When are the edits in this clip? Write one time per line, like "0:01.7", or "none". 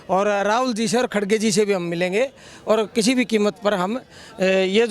none